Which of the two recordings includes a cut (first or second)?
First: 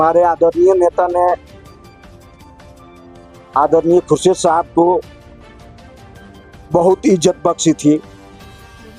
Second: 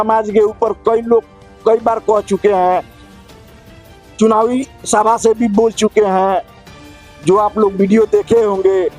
first